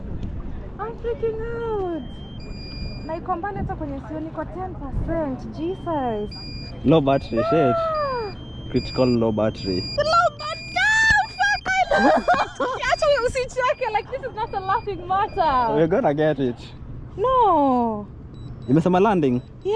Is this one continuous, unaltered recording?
yes; 0 cuts

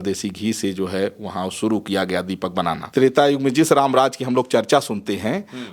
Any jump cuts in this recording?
yes; 1 cut; at 2.8 s

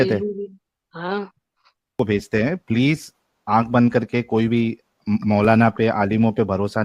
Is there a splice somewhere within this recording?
yes; 1 cut; at 2.0 s

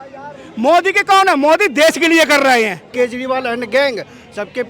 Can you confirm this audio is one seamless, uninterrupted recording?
no; 1 cut; at 2.9 s

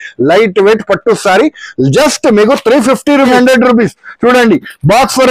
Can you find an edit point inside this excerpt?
yes; 1 cut; at 3.3 s

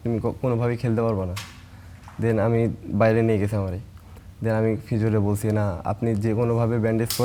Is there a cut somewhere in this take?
no; 0 cuts

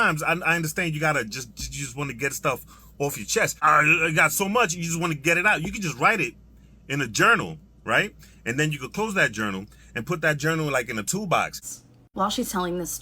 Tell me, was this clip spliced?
yes; 2 cuts; at 3.6 s, 11.6 s

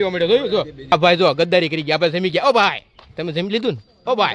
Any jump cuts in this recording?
yes; 1 cut; at 0.9 s

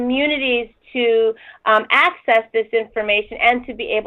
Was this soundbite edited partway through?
no; 0 cuts

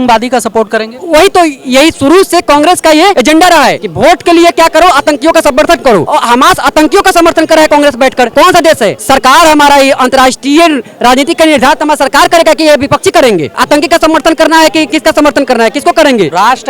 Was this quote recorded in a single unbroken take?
yes; 0 cuts

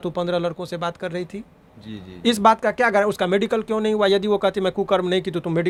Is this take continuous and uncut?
yes; 0 cuts

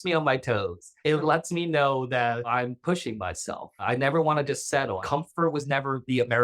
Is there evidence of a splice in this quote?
yes; 4 cuts; at 1.2 s, 2.5 s, 3.8 s, 5.0 s

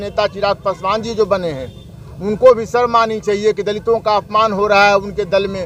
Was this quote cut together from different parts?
no; 0 cuts

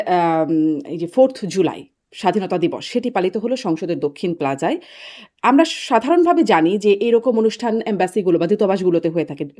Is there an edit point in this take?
no; 0 cuts

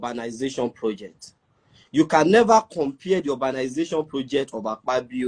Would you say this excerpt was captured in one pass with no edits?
yes; 0 cuts

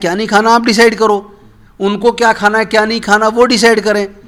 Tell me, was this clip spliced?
no; 0 cuts

